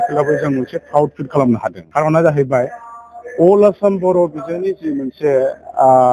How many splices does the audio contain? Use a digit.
1